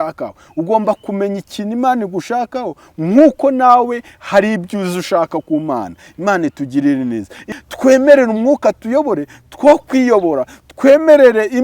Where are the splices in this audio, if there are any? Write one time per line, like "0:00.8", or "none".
0:07.6